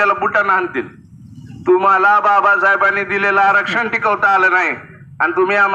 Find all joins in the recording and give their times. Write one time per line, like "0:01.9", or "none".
none

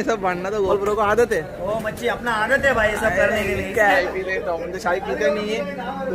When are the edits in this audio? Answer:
0:04.0

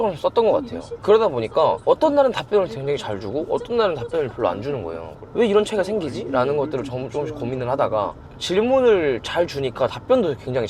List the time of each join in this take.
none

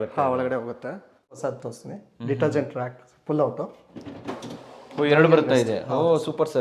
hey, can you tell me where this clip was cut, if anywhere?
0:01.4

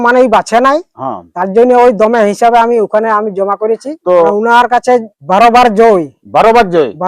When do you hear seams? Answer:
0:04.3
0:05.1

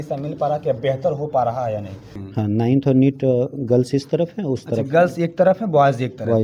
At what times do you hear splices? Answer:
0:02.2

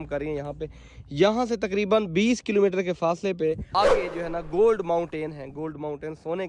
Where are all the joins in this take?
0:03.7

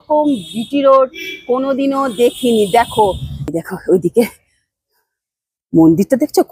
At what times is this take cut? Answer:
0:03.3

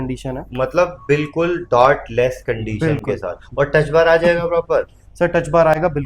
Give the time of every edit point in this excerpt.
none

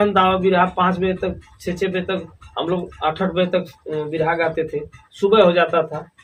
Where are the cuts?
none

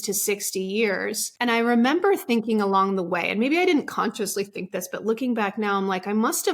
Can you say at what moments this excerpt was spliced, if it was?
0:01.3

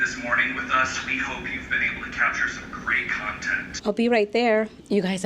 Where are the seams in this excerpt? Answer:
0:03.8

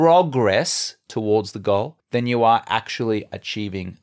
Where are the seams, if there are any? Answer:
0:02.0

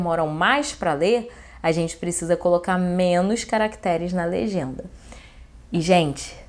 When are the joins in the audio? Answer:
none

